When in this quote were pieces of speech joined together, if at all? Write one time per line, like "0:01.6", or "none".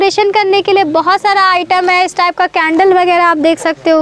none